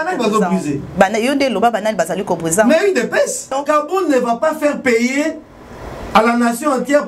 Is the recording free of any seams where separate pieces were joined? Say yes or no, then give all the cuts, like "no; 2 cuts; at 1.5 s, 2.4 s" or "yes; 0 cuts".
no; 1 cut; at 3.5 s